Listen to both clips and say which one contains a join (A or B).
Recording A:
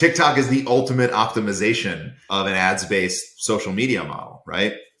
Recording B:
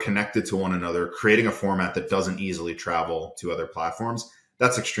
A